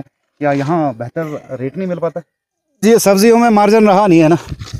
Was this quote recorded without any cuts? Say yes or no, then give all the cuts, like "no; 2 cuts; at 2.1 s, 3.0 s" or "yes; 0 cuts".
no; 1 cut; at 2.8 s